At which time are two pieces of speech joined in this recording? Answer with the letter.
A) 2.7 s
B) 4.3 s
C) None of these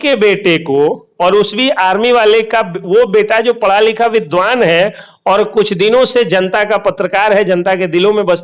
C